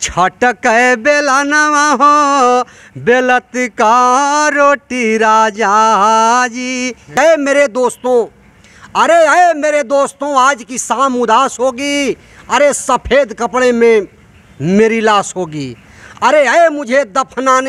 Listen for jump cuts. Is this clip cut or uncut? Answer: cut